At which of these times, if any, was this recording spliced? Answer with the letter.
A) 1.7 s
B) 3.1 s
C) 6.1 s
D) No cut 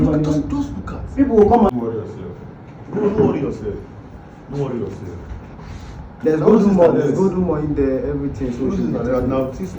A